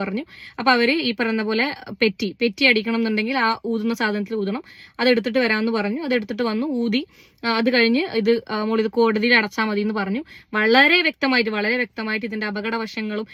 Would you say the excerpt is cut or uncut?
uncut